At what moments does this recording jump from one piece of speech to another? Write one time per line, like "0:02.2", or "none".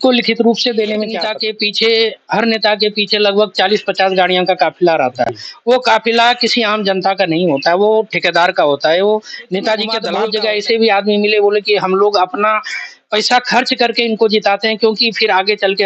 0:01.3
0:10.0